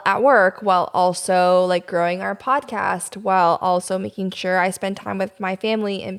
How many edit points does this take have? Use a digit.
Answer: 0